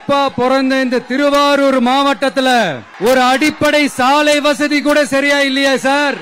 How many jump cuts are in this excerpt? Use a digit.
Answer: 1